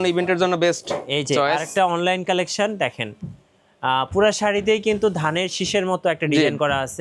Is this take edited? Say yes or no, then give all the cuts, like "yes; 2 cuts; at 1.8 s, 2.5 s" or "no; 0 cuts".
no; 0 cuts